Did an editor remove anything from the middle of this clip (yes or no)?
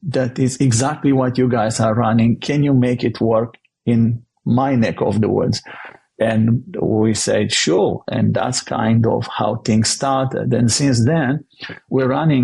no